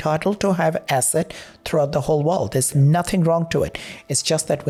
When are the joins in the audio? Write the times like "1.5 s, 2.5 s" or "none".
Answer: none